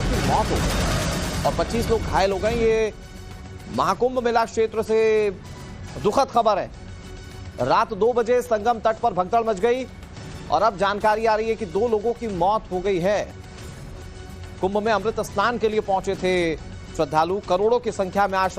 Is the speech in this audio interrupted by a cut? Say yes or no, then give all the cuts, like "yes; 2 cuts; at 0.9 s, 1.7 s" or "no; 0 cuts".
yes; 1 cut; at 2.8 s